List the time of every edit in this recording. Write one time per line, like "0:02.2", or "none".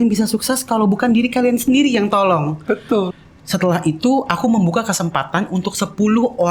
0:03.1